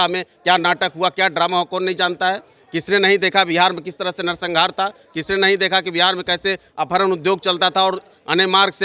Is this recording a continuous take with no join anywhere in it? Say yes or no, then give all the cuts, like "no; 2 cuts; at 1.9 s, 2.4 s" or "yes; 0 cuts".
yes; 0 cuts